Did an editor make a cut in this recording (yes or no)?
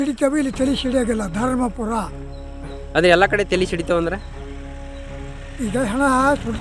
no